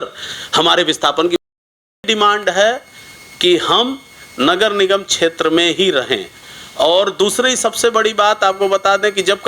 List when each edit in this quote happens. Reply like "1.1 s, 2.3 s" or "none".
2.0 s